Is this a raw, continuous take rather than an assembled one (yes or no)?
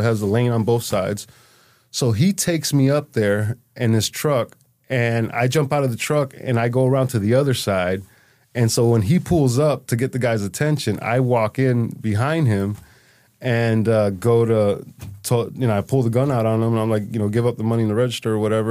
yes